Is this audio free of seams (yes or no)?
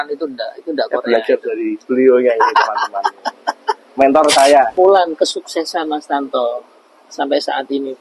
no